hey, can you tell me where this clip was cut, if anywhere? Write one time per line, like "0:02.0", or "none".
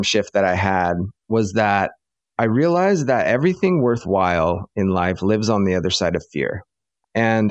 0:01.1